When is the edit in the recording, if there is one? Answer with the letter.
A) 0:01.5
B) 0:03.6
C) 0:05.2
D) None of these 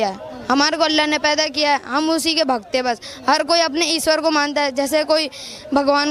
D